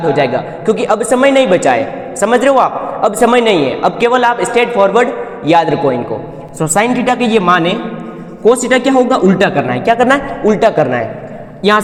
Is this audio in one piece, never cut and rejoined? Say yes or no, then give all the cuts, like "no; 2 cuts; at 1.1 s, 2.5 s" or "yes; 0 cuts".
yes; 0 cuts